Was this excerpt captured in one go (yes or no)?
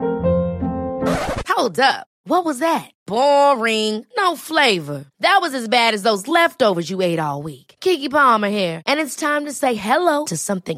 yes